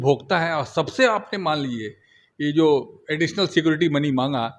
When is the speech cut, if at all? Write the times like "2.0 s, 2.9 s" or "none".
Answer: none